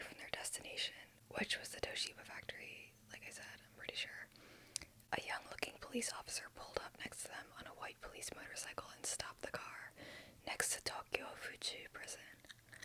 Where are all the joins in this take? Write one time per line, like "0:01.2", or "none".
none